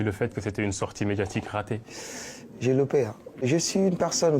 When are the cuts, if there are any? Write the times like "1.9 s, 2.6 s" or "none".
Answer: 1.8 s, 3.5 s